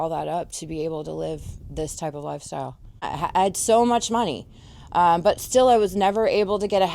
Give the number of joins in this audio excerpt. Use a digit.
1